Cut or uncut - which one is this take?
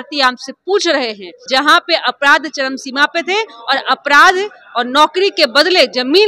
cut